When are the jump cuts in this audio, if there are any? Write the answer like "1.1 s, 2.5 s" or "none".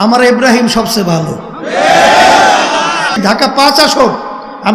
3.1 s